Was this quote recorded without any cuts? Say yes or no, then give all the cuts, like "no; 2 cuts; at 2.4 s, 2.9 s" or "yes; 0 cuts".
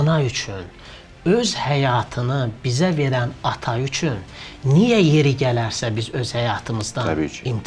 yes; 0 cuts